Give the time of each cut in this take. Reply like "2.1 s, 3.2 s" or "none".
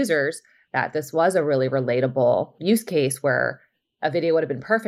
none